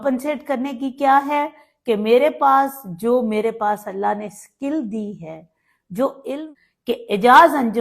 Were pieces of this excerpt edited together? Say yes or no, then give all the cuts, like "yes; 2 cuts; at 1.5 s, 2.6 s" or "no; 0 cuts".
yes; 1 cut; at 6.3 s